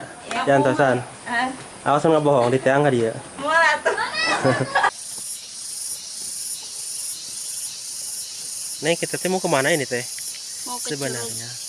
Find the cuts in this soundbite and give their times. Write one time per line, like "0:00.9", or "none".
0:04.9